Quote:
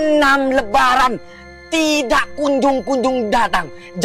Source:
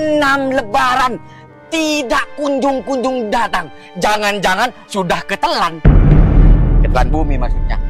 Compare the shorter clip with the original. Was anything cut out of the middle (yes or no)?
no